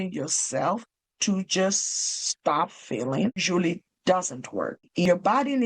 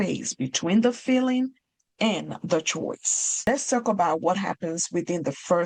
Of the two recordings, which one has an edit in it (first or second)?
first